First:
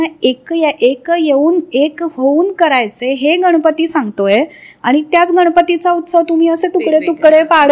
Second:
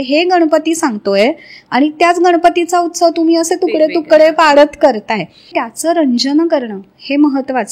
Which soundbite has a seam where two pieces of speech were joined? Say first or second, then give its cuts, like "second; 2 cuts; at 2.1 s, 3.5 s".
second; 1 cut; at 5.5 s